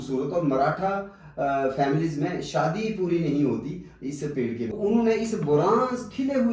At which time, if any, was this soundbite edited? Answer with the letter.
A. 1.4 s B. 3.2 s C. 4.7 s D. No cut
C